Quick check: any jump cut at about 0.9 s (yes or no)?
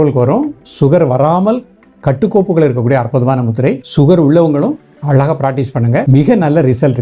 no